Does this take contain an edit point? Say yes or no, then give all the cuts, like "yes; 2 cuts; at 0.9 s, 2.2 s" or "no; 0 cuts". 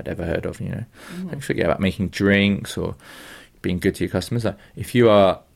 yes; 1 cut; at 3.5 s